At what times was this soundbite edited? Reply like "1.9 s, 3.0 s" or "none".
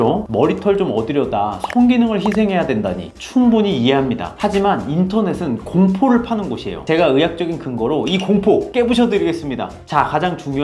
none